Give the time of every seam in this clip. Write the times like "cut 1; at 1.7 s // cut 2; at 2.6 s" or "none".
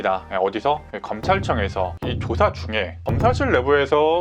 cut 1; at 2.0 s